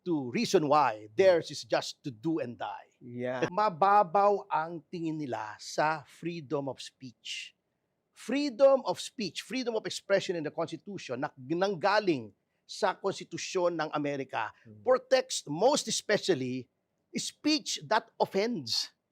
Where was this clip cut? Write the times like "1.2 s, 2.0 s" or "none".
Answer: 3.5 s